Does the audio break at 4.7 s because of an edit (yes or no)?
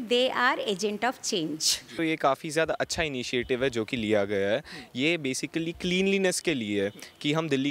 no